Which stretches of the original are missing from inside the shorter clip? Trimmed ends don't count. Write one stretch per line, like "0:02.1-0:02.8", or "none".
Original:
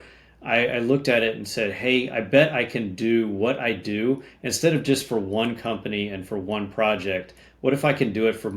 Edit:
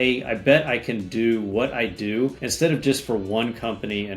0:04.3-0:04.5